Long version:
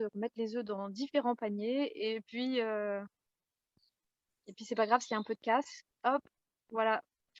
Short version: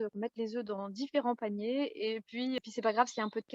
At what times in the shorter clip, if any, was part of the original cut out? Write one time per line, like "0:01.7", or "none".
0:02.6